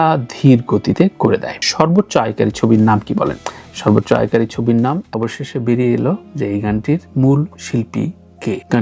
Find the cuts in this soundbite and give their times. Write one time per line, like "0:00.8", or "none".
0:05.0